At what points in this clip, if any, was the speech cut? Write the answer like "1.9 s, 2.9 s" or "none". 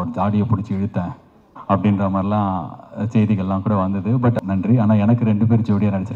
4.4 s

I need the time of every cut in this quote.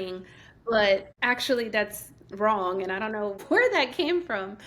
1.1 s, 3.4 s

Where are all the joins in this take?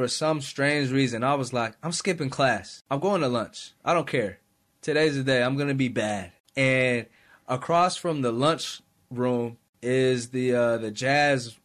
2.7 s, 6.4 s, 9.6 s

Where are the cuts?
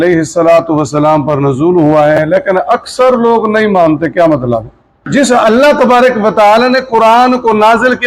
5.0 s

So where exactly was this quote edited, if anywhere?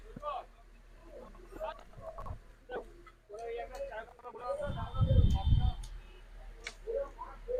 none

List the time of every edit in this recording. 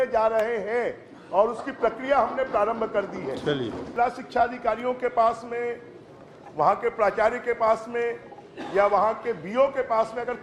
3.8 s

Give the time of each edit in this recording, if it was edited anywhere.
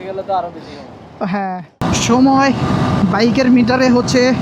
1.8 s

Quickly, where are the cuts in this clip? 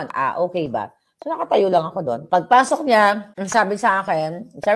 2.2 s, 3.3 s

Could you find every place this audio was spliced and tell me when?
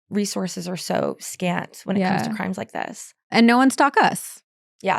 3.2 s

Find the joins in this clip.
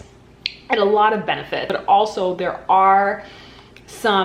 1.7 s

